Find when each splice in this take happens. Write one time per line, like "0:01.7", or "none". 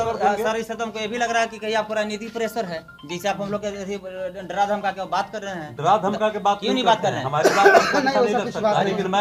none